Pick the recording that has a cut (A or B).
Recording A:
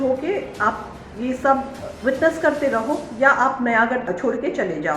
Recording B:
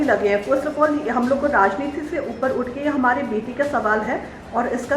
A